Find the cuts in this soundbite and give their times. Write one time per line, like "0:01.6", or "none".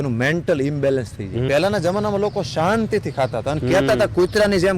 0:01.5